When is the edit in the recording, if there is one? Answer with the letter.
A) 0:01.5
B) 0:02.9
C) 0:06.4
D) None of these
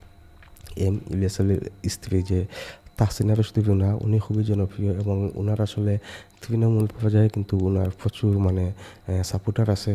D